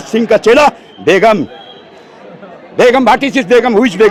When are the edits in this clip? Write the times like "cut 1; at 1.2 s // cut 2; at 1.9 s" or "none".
none